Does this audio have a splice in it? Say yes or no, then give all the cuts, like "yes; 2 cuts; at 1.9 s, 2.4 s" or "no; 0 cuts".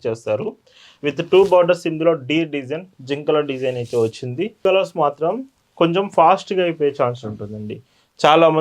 yes; 1 cut; at 4.6 s